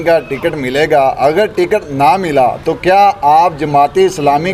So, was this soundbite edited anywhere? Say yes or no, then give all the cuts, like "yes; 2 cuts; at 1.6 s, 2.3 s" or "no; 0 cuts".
no; 0 cuts